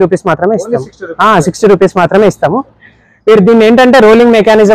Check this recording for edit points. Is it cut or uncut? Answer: uncut